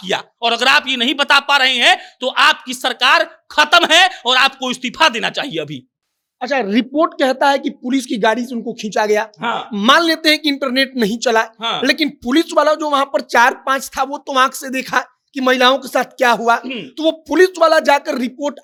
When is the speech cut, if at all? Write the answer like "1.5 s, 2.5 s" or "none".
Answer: none